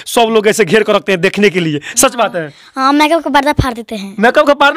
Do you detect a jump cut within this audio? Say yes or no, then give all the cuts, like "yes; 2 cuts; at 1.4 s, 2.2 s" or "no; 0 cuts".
no; 0 cuts